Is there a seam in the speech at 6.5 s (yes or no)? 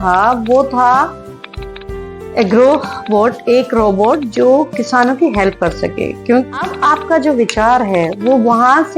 yes